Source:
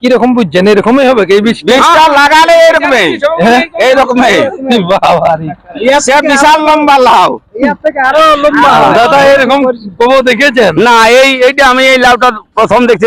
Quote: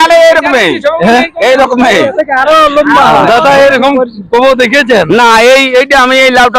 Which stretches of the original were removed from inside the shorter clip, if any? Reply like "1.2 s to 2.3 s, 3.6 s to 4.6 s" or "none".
4.5 s to 7.8 s